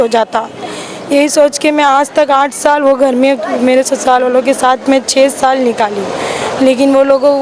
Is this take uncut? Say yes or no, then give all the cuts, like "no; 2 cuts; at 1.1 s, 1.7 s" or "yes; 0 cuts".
yes; 0 cuts